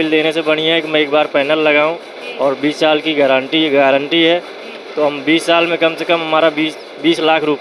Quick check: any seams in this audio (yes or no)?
no